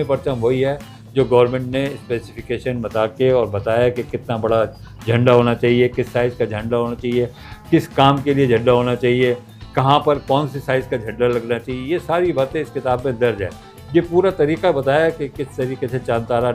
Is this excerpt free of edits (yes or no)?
yes